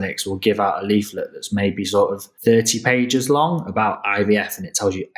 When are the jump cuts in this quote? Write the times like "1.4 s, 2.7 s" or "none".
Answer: 2.3 s